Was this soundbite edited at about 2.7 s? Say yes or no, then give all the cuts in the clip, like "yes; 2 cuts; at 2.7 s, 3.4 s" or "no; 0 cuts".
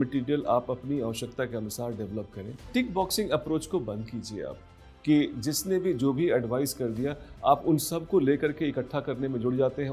yes; 1 cut; at 2.7 s